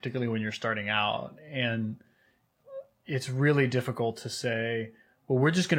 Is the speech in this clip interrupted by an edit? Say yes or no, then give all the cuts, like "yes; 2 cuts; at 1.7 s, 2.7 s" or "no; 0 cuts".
no; 0 cuts